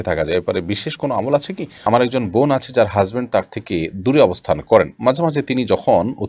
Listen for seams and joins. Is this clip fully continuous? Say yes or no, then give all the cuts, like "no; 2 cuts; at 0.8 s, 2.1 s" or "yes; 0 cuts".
no; 1 cut; at 1.8 s